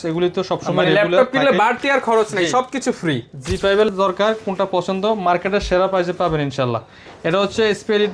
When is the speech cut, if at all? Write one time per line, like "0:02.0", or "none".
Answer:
0:03.9

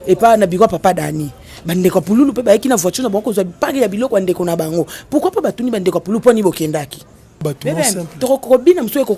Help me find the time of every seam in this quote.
0:07.5

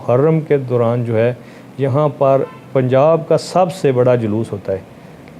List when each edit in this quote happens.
none

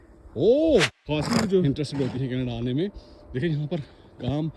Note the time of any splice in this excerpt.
0:01.0
0:01.6

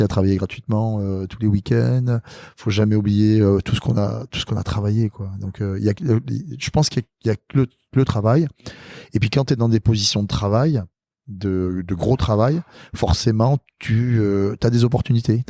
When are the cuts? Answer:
none

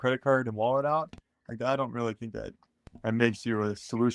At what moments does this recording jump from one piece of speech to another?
none

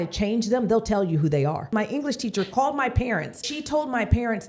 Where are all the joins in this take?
0:01.7
0:03.5

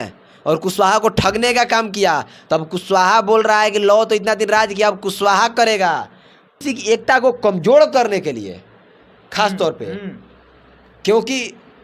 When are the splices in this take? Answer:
0:06.6

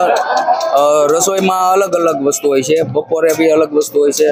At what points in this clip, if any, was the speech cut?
none

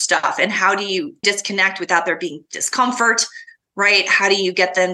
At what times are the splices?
0:01.2

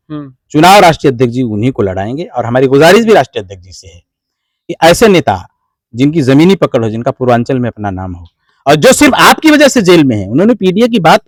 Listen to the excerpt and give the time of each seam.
none

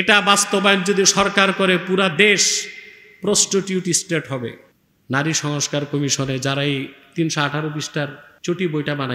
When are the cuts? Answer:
0:04.7
0:08.3

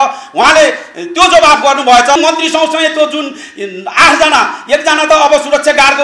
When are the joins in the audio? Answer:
0:02.2

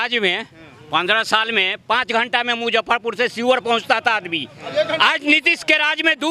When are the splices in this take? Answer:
none

